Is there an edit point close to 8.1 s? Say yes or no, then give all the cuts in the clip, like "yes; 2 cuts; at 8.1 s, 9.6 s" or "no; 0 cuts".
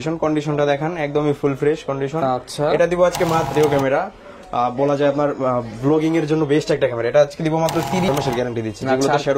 yes; 2 cuts; at 3.5 s, 8.1 s